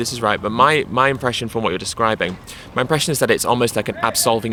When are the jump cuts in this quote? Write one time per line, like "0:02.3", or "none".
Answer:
none